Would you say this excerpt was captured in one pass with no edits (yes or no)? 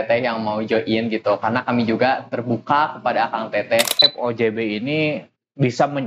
no